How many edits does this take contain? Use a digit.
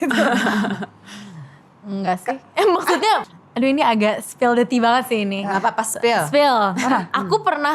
2